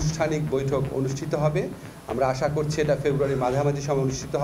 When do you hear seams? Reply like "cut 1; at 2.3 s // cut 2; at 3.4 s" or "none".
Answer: none